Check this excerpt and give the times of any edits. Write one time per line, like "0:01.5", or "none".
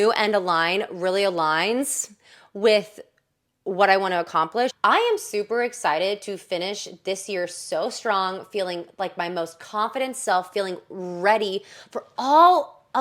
0:04.7